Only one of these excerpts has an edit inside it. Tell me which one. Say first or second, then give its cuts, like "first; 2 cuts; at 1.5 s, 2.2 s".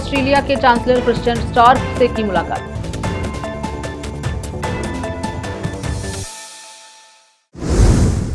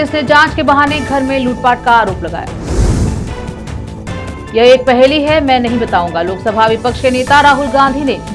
first; 1 cut; at 7.4 s